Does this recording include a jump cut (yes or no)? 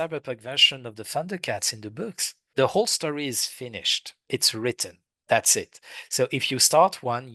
yes